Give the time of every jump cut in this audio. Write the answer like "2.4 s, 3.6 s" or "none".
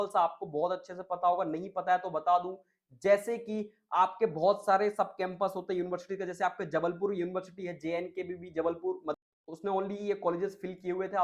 9.3 s